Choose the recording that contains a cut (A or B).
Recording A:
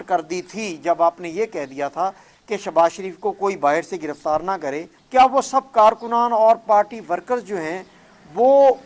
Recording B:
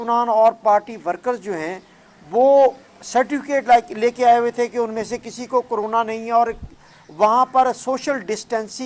A